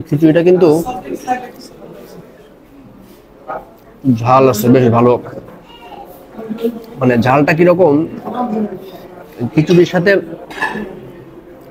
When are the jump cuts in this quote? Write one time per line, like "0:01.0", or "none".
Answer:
none